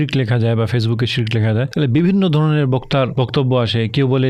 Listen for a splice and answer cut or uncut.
uncut